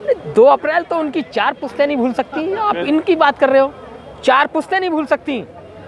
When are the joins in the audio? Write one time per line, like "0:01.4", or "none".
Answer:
none